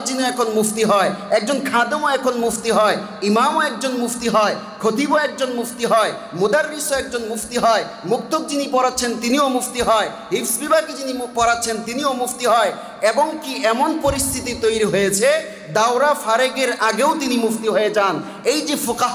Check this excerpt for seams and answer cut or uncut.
uncut